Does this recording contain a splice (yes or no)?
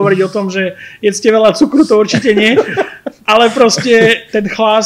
no